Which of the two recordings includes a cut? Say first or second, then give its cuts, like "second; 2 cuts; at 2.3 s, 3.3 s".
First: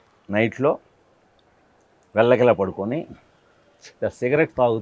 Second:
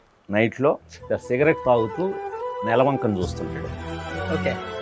second; 1 cut; at 0.9 s